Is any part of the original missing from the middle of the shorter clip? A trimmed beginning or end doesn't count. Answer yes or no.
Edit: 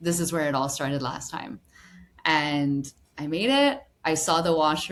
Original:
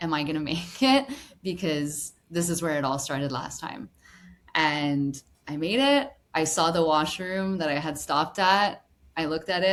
no